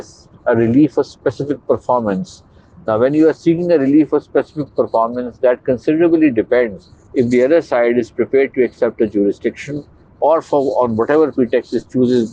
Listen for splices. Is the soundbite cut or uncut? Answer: uncut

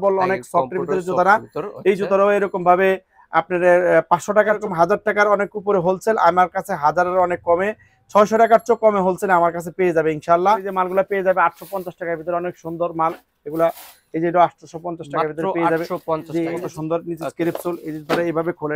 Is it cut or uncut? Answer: cut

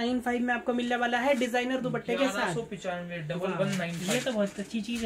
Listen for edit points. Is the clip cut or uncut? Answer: uncut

